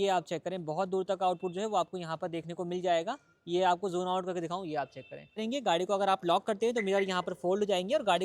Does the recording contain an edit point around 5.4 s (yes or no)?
yes